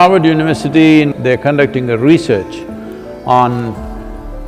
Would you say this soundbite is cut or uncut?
cut